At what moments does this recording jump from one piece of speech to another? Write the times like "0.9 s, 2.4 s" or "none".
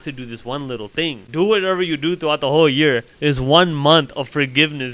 1.2 s